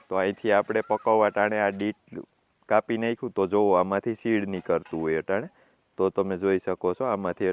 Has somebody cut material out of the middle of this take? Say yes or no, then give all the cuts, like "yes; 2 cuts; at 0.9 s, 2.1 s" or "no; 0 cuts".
no; 0 cuts